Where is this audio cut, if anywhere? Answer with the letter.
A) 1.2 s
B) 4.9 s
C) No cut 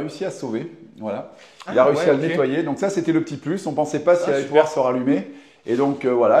C